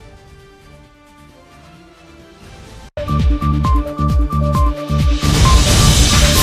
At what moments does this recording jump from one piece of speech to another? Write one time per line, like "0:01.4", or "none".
0:02.9

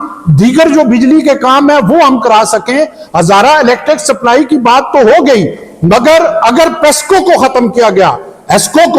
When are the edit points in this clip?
none

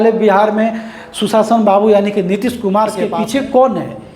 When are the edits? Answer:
0:03.1

